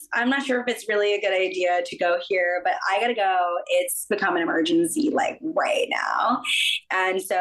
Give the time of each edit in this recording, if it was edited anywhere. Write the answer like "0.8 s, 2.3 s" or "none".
none